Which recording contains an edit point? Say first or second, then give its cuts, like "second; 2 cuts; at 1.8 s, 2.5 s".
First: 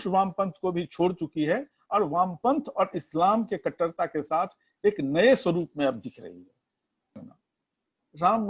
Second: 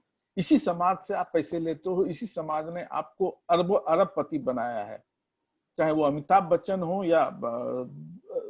first; 1 cut; at 7.2 s